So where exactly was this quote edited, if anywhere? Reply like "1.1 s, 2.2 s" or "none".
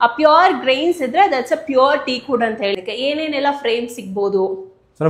2.8 s